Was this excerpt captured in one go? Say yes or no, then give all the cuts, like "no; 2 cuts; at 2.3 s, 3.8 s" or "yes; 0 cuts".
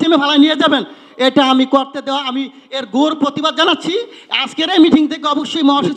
yes; 0 cuts